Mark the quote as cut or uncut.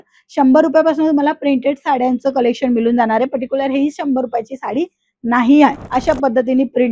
cut